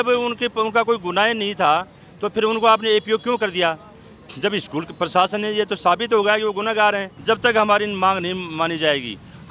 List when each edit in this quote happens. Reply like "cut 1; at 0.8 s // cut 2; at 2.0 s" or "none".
cut 1; at 7.1 s